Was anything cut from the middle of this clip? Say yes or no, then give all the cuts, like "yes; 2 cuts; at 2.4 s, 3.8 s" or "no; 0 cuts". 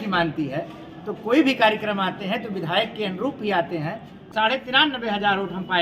yes; 1 cut; at 4.3 s